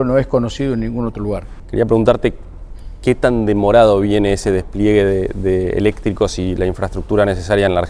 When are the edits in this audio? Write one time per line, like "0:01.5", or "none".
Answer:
0:01.5